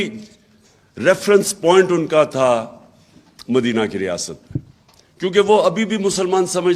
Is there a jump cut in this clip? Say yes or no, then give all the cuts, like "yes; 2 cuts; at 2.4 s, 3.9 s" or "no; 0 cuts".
no; 0 cuts